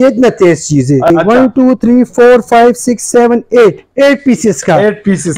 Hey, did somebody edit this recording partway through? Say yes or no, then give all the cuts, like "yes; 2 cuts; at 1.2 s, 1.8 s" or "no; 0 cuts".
yes; 1 cut; at 1.1 s